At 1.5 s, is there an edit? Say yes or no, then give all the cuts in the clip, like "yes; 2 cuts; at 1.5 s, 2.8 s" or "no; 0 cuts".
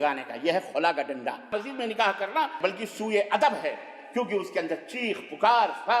yes; 2 cuts; at 1.5 s, 2.5 s